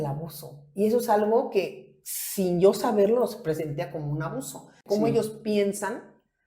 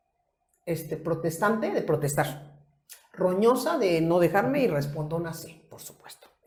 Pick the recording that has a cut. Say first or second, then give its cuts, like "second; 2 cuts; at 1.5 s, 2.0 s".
first; 1 cut; at 4.8 s